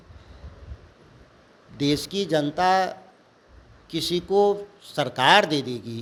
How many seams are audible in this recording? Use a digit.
0